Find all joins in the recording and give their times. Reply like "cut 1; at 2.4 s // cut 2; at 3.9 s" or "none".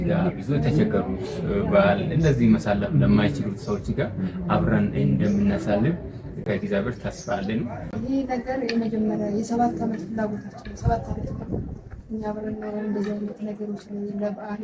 cut 1; at 6.4 s // cut 2; at 7.9 s